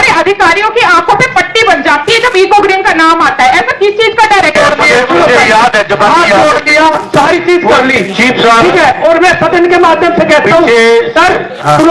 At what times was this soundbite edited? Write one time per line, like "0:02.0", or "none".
0:04.5